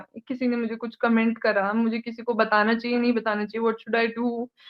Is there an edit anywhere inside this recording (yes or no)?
no